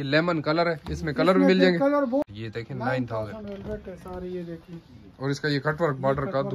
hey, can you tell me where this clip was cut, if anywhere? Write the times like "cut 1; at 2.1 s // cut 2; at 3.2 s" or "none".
cut 1; at 2.2 s